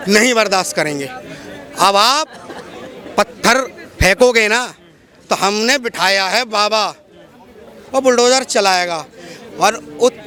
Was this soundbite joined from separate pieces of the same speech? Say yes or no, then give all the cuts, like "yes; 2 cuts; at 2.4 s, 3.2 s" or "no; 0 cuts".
no; 0 cuts